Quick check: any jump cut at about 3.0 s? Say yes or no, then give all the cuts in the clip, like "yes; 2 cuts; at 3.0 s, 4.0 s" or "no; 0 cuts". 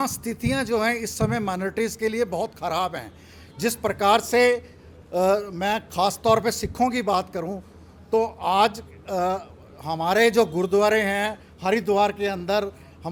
no; 0 cuts